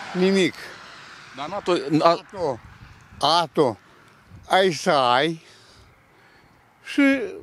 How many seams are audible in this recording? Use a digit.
0